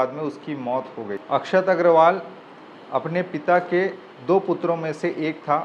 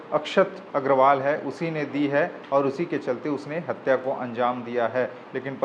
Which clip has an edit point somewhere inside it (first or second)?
first